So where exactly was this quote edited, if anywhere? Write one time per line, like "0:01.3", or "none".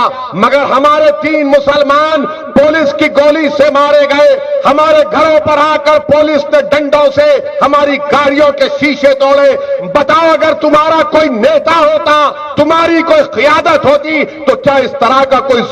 none